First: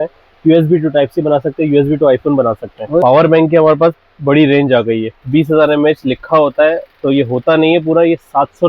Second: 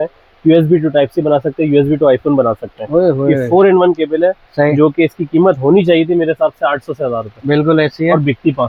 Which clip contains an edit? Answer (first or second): first